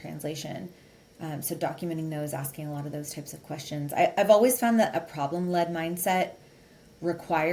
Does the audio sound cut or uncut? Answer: uncut